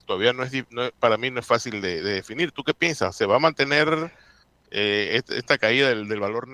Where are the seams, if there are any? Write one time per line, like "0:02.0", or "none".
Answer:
none